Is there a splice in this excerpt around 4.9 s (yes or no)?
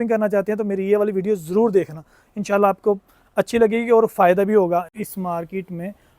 yes